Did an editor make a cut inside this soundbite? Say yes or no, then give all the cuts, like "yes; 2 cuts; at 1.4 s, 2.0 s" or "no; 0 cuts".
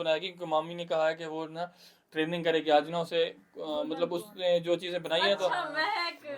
no; 0 cuts